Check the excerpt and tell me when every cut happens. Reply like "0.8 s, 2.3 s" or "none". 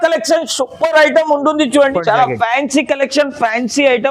1.9 s